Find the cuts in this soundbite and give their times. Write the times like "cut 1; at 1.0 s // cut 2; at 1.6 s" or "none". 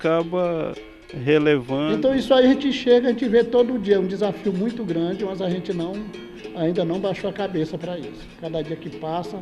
cut 1; at 1.9 s